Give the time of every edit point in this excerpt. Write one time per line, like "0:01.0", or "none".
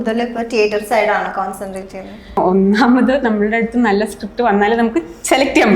0:02.4